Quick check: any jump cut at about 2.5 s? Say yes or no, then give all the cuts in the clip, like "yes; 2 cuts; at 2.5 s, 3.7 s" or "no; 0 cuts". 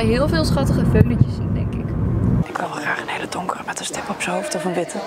yes; 1 cut; at 2.5 s